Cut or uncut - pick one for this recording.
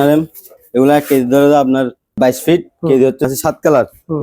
cut